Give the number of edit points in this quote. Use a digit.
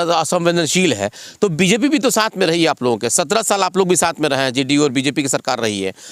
0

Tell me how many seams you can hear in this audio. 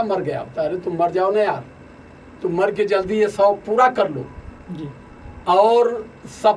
0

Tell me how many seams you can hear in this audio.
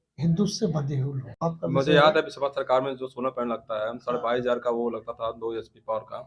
1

